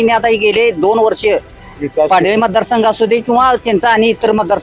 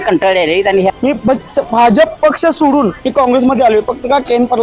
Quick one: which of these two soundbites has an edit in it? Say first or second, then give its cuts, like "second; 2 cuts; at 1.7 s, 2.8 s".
second; 2 cuts; at 0.9 s, 3.0 s